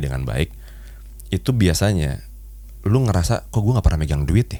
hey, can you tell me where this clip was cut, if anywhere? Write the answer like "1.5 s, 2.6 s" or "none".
none